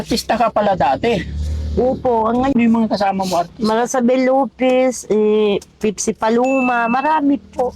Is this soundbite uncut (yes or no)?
no